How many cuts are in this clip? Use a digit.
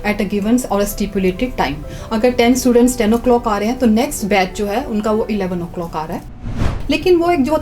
1